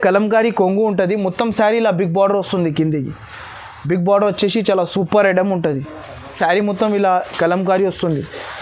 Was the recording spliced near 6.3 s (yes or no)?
yes